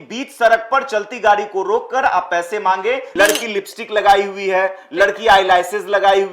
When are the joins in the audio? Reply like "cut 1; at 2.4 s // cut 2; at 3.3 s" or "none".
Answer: cut 1; at 3.1 s